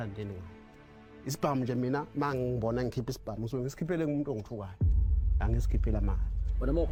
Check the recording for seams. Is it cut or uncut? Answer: uncut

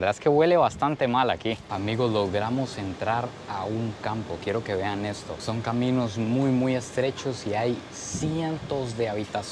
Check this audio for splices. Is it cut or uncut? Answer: cut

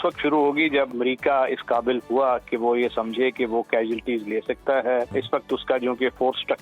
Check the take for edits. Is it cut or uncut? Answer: cut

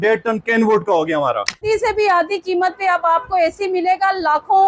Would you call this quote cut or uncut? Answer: cut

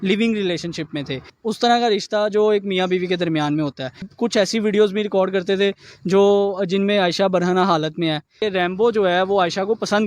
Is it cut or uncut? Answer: cut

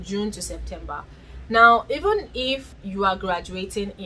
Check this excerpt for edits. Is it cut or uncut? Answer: cut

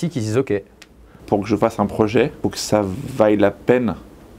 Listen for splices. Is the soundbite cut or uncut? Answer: cut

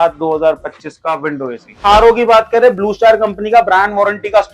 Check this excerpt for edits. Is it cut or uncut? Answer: cut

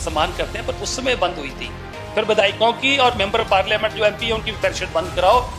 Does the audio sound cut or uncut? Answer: cut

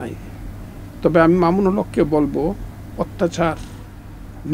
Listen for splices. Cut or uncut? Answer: uncut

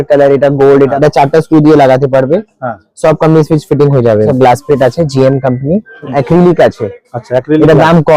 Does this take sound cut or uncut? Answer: cut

